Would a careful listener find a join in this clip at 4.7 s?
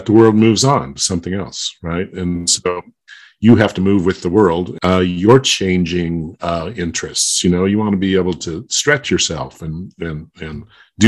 yes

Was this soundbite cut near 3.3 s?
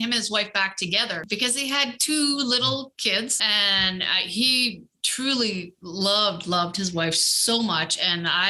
yes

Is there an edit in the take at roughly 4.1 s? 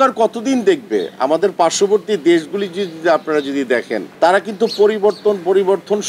yes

